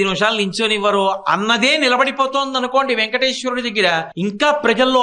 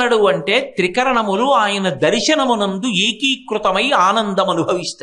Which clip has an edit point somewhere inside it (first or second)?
first